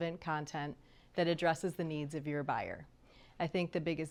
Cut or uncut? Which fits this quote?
uncut